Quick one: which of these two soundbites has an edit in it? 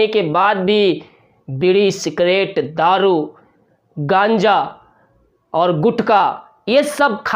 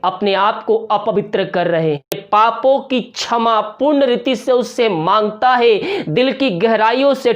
second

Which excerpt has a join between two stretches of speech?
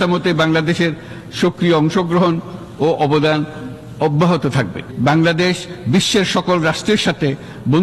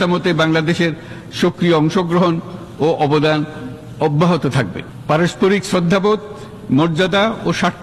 first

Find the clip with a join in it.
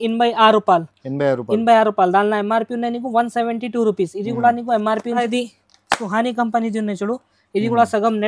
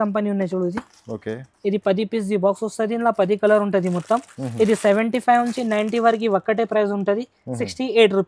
first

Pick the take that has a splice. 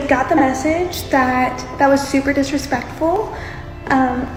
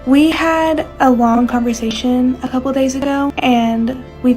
second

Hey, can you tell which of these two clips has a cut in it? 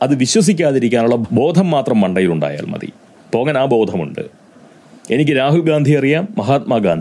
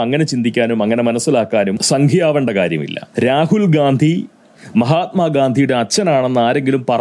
second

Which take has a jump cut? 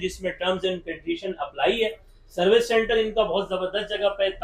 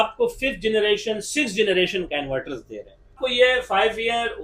second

